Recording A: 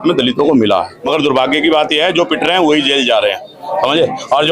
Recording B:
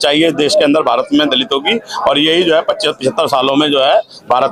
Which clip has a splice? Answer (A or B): A